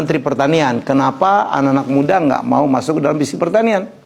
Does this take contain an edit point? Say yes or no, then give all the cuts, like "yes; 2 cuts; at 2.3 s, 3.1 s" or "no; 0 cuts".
no; 0 cuts